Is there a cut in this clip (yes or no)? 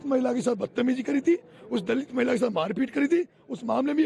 no